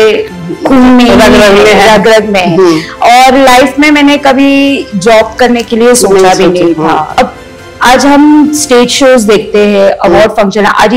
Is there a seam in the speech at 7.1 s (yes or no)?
yes